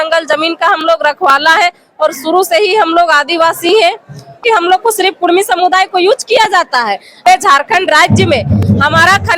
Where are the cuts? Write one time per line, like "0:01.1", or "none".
0:04.4
0:07.2